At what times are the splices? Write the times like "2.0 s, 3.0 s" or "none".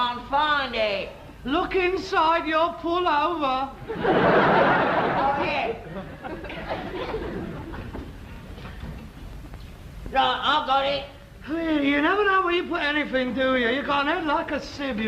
13.1 s